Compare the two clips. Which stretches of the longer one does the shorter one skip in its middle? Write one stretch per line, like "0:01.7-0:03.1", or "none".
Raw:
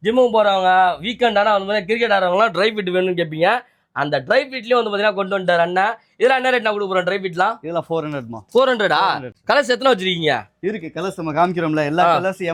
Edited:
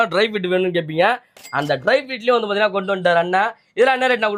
none